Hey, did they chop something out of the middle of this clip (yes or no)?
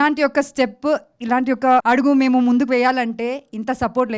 yes